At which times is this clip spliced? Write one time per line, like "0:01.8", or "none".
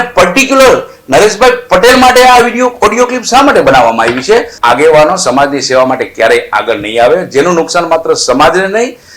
0:04.5